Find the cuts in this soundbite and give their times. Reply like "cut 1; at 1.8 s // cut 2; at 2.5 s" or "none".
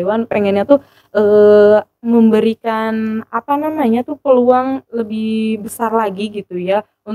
none